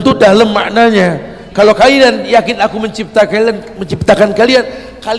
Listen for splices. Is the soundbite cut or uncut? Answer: uncut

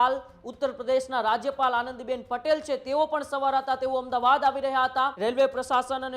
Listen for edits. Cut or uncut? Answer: cut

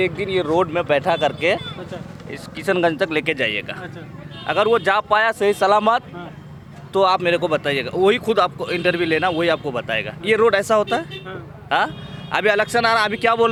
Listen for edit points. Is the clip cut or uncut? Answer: uncut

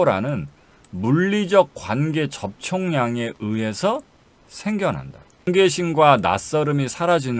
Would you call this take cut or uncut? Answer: cut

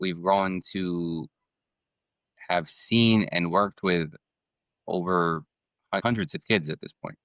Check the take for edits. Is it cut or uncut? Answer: uncut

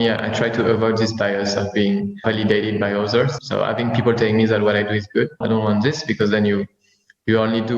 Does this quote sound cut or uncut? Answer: cut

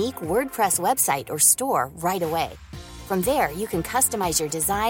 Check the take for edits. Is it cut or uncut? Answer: uncut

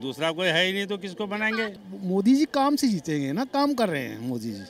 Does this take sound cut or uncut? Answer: cut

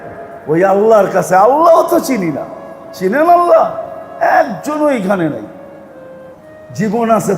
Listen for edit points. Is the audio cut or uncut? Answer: cut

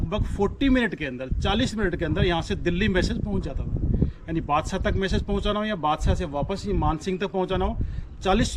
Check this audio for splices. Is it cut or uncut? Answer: uncut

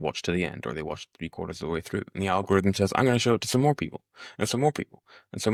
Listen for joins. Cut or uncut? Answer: uncut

